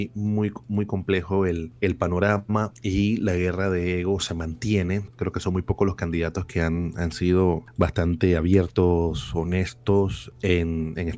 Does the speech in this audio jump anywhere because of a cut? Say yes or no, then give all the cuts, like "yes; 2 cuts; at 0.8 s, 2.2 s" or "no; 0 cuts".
yes; 5 cuts; at 1.7 s, 2.8 s, 5.1 s, 7.7 s, 10.2 s